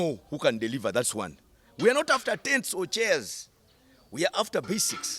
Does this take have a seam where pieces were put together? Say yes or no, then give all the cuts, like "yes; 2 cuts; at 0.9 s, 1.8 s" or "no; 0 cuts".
no; 0 cuts